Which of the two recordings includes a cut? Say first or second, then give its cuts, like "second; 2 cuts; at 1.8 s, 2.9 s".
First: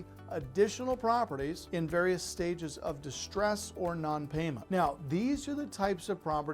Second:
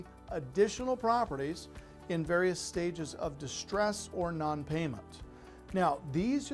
first; 2 cuts; at 1.6 s, 4.6 s